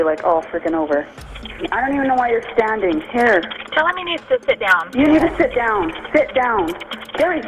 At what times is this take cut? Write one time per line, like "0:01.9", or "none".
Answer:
0:01.1